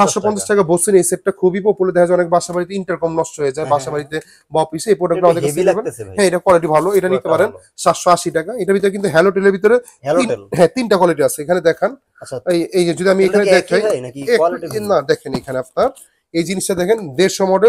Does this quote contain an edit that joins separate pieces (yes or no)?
no